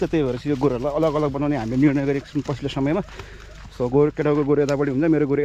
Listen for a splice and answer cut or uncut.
uncut